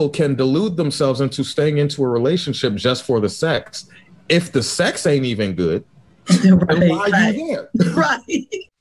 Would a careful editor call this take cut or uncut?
uncut